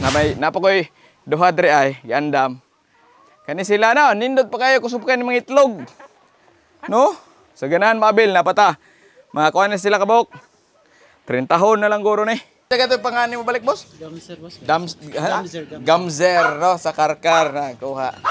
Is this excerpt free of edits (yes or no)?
no